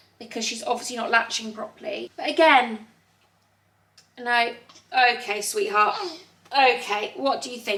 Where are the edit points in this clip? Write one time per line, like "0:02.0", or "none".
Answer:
none

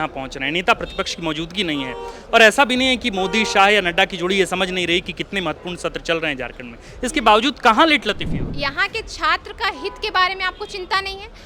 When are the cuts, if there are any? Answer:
0:08.4

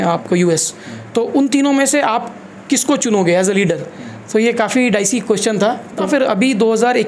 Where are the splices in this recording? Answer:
0:06.0

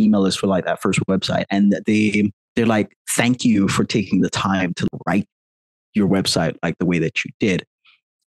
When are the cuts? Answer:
0:02.4
0:04.9

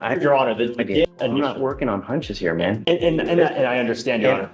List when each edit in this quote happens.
0:01.1

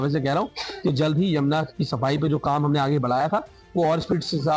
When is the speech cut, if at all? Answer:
none

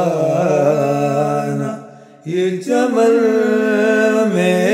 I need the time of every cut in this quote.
none

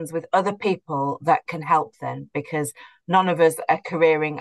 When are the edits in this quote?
none

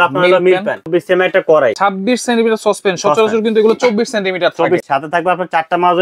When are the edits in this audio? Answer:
0:00.9
0:01.8
0:04.8

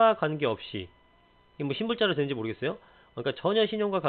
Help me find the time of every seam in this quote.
none

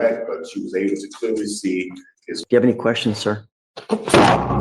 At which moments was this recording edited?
0:02.3

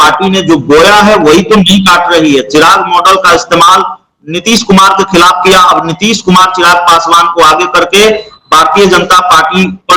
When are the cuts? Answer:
none

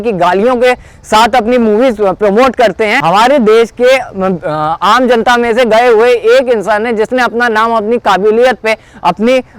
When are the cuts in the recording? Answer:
0:03.0

